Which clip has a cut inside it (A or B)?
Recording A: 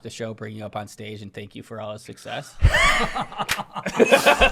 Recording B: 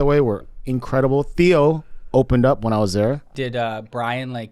B